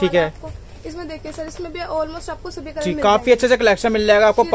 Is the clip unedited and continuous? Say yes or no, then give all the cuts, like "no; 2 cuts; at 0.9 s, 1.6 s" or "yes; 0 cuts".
yes; 0 cuts